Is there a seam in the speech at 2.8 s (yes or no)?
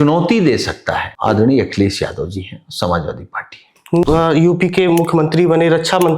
no